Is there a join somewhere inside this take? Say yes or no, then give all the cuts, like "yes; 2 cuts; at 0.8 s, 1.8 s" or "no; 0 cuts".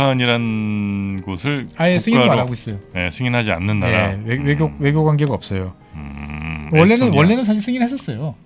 no; 0 cuts